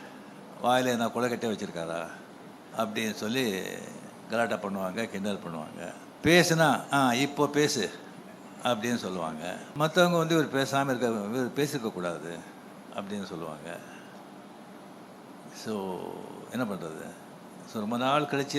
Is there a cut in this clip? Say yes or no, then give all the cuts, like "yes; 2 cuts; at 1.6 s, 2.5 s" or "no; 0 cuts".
yes; 2 cuts; at 6.0 s, 9.7 s